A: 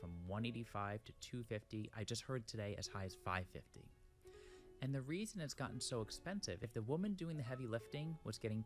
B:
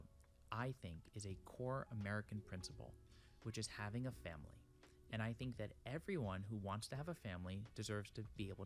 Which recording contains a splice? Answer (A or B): A